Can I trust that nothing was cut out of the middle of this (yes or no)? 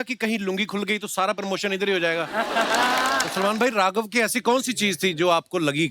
no